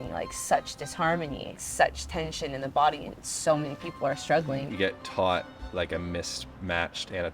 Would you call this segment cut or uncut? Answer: cut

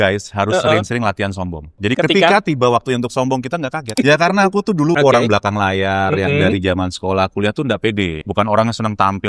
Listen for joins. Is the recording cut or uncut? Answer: cut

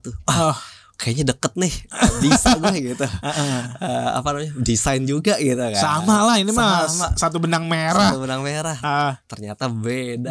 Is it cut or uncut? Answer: uncut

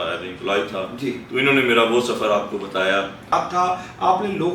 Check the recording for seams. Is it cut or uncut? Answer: cut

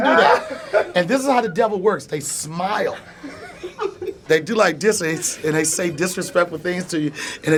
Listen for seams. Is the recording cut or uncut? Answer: uncut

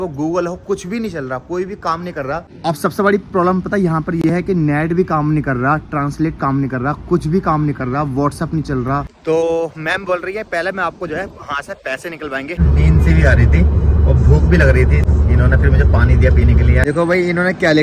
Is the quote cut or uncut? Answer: cut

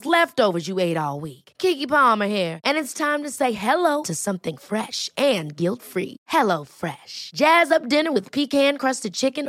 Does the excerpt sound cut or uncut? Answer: uncut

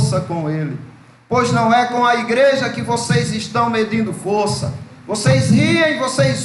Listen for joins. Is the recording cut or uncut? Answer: uncut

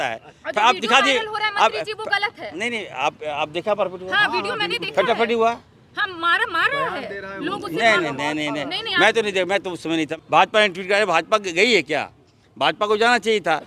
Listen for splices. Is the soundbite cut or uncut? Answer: cut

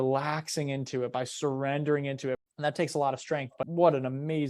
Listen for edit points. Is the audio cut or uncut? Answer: cut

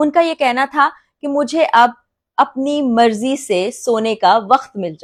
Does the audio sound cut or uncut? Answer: uncut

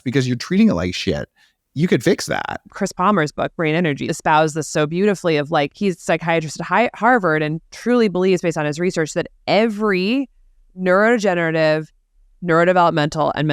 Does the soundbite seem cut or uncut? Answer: cut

